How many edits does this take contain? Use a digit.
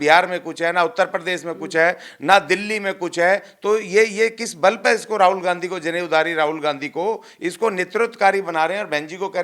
0